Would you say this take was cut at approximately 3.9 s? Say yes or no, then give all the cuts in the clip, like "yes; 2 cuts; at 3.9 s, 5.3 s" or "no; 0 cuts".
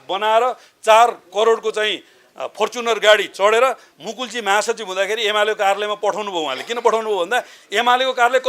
yes; 1 cut; at 3.9 s